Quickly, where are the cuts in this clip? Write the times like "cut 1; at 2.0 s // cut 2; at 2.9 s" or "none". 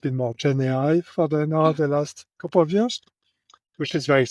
none

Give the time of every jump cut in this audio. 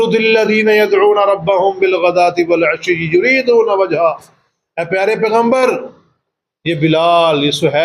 none

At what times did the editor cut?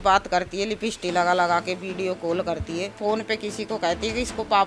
cut 1; at 2.9 s

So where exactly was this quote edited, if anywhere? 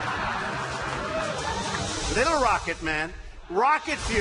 cut 1; at 2.8 s

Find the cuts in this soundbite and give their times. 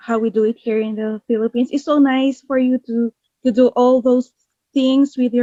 none

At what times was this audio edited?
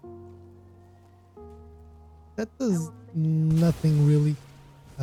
none

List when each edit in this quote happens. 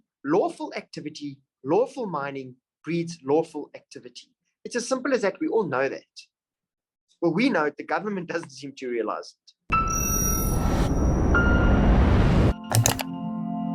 cut 1; at 9.5 s

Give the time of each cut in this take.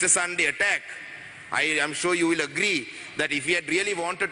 none

